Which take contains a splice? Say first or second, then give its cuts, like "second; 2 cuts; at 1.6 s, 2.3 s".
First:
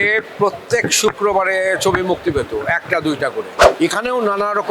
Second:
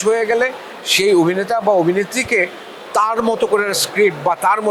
first; 1 cut; at 3.6 s